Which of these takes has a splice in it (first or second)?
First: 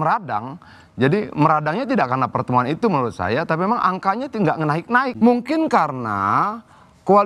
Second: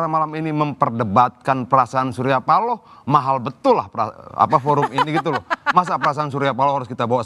first